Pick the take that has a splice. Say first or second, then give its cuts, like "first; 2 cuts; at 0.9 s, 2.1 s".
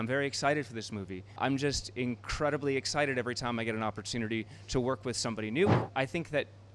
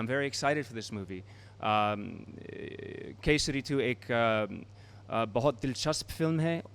first; 2 cuts; at 1.4 s, 5.8 s